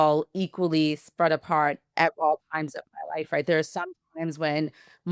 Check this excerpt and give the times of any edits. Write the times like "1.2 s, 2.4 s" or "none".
none